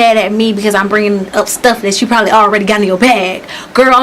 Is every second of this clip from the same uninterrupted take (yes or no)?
yes